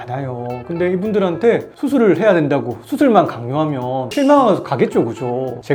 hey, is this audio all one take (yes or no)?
yes